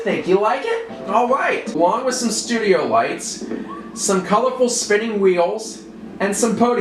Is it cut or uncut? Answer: cut